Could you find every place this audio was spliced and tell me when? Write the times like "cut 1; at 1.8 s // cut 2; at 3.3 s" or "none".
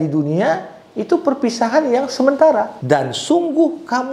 cut 1; at 2.8 s